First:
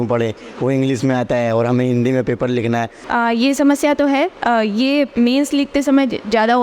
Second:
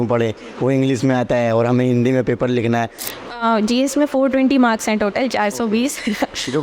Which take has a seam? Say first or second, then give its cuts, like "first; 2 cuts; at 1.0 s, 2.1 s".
second; 1 cut; at 3.0 s